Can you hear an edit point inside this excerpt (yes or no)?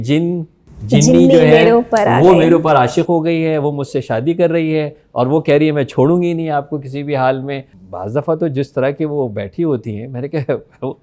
yes